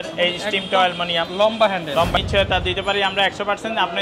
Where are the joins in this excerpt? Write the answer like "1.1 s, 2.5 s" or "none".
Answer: 2.2 s